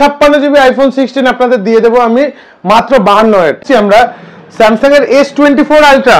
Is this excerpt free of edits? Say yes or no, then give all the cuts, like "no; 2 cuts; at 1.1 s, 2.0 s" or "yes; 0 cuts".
no; 1 cut; at 3.6 s